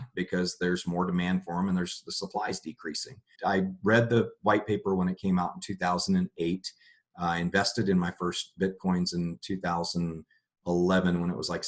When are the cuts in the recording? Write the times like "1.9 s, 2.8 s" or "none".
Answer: 3.3 s